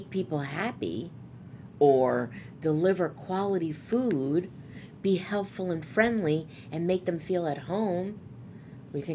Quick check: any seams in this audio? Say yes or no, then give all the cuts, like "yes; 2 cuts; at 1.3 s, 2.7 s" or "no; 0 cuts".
no; 0 cuts